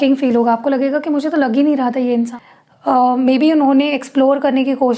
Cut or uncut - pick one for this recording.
cut